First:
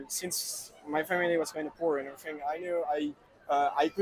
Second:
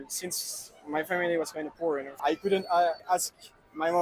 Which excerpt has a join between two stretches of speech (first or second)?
second